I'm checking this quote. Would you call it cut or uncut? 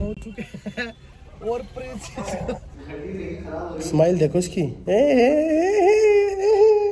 cut